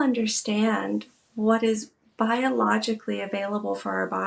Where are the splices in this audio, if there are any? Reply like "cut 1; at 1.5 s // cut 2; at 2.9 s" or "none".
none